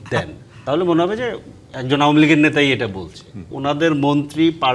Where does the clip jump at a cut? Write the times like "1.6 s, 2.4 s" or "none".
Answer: 3.5 s

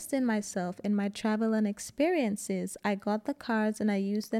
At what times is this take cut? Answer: none

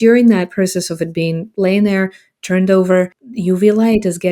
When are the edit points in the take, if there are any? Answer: 3.2 s

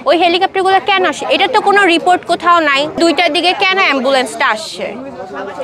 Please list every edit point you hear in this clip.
3.0 s

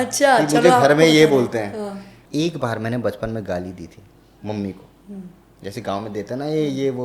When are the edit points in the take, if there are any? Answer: 2.1 s

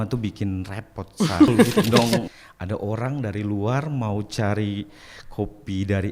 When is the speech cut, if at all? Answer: 2.2 s

